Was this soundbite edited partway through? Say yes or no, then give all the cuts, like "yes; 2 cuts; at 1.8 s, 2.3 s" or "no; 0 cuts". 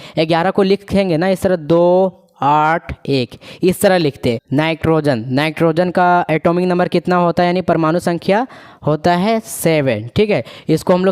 yes; 1 cut; at 4.4 s